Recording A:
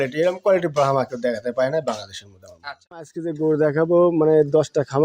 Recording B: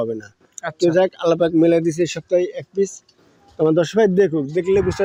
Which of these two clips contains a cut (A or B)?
A